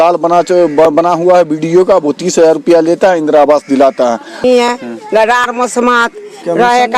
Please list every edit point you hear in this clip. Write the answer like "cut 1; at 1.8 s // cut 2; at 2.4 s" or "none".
cut 1; at 4.4 s